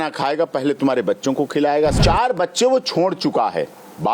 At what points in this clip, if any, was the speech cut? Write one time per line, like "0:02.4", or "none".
0:02.0